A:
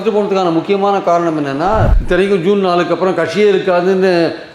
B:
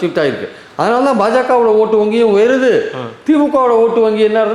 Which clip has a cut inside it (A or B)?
A